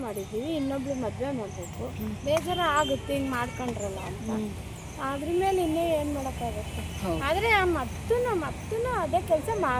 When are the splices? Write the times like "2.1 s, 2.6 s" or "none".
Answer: none